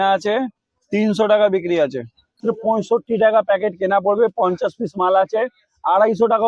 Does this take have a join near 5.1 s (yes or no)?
no